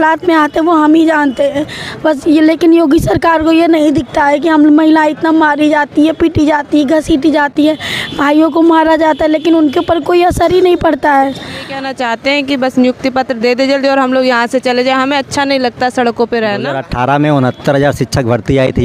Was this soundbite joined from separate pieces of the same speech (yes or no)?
yes